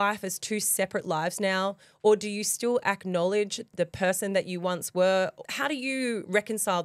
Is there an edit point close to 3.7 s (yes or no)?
no